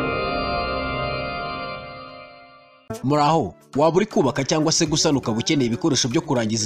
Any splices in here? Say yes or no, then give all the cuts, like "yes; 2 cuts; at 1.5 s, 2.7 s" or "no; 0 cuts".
no; 0 cuts